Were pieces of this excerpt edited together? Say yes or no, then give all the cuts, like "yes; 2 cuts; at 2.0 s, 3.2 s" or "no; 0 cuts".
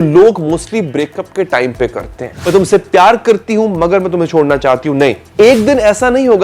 yes; 2 cuts; at 2.4 s, 5.2 s